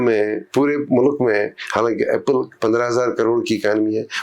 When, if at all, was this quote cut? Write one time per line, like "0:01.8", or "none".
none